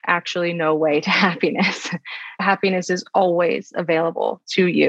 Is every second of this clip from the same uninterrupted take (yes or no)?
no